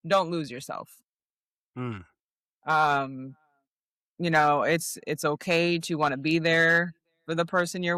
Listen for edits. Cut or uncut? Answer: uncut